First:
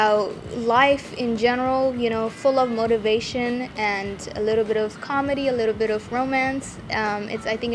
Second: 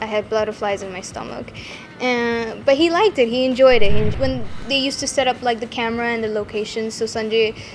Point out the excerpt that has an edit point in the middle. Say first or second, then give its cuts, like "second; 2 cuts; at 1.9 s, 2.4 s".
second; 1 cut; at 4.1 s